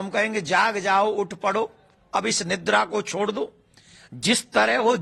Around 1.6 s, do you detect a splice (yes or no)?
no